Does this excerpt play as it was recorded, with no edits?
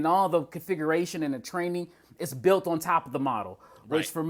yes; 0 cuts

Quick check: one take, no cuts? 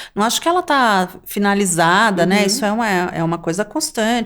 yes; 0 cuts

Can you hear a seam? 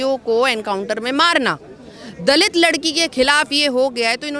no; 0 cuts

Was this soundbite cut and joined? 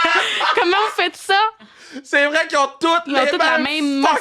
yes; 1 cut; at 1.8 s

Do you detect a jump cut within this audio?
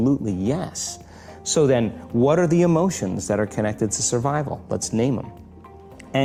no; 0 cuts

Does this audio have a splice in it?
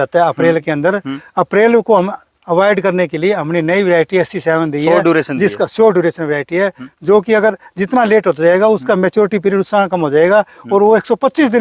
no; 0 cuts

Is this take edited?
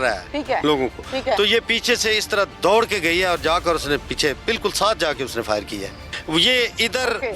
yes; 1 cut; at 6.0 s

